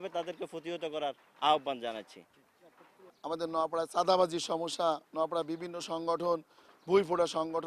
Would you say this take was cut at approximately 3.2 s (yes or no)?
yes